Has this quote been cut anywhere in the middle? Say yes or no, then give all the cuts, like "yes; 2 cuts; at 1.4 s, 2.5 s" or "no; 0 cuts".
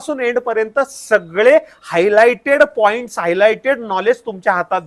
no; 0 cuts